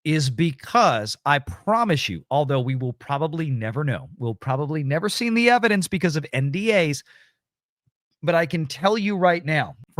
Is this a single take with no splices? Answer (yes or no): yes